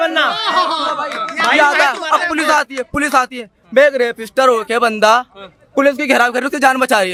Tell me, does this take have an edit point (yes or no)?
no